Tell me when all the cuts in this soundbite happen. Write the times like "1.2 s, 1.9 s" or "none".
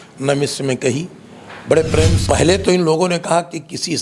2.2 s